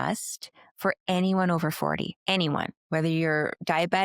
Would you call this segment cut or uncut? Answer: cut